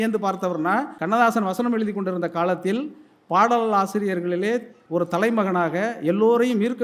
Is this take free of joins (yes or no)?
no